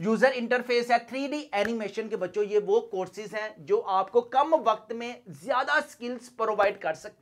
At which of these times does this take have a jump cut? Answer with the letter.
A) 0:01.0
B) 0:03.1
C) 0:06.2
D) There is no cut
D